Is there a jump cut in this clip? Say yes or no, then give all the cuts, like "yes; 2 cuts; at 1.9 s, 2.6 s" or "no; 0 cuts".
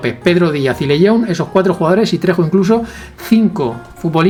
no; 0 cuts